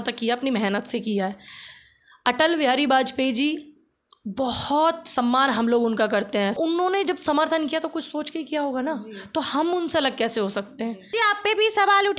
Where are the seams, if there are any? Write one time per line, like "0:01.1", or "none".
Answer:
0:06.5
0:11.1